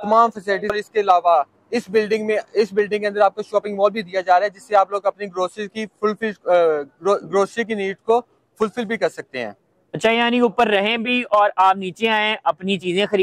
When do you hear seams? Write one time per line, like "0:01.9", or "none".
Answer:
none